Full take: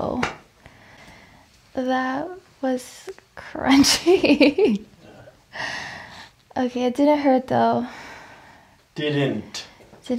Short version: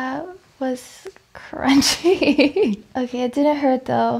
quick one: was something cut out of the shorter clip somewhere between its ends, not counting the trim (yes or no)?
yes